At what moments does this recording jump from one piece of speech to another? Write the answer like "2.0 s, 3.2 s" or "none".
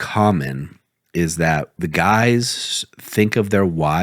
1.7 s